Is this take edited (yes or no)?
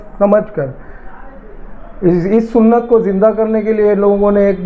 no